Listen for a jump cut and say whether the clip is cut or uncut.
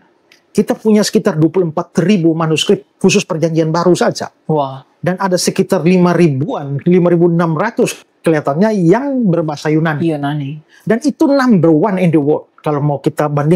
uncut